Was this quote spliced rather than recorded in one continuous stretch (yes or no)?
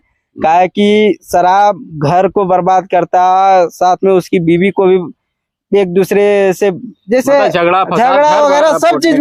no